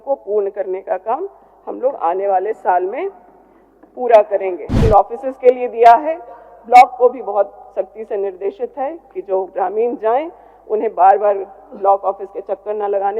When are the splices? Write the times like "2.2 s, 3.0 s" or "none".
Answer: 4.8 s